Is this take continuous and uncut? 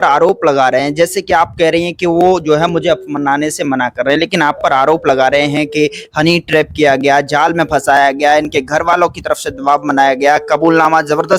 yes; 0 cuts

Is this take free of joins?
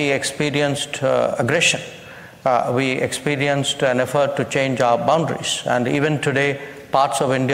yes; 0 cuts

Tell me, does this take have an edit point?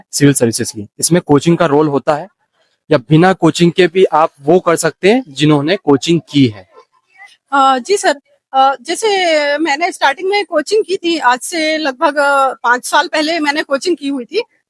no; 0 cuts

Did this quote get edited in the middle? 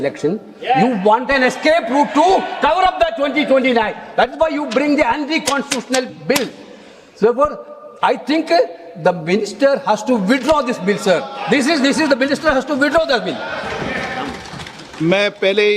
no; 0 cuts

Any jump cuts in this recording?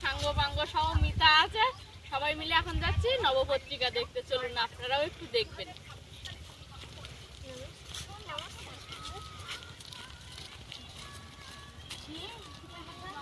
no; 0 cuts

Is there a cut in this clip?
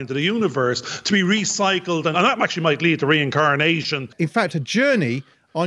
yes; 2 cuts; at 2.1 s, 4.1 s

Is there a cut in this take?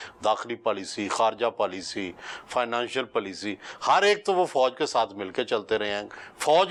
no; 0 cuts

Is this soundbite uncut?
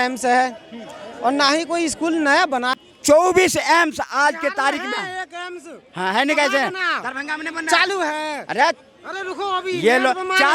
no; 1 cut; at 2.7 s

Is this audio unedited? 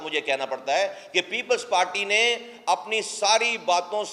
yes; 0 cuts

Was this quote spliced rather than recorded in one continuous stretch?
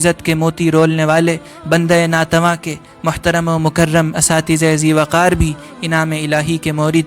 no; 0 cuts

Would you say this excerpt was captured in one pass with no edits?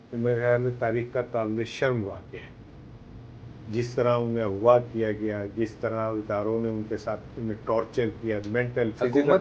yes; 0 cuts

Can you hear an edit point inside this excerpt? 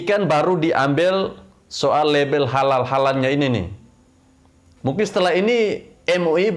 no; 0 cuts

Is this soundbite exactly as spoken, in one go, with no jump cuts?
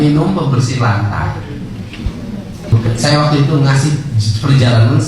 no; 1 cut; at 2.7 s

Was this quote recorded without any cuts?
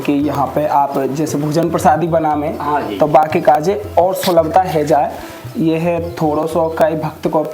yes; 0 cuts

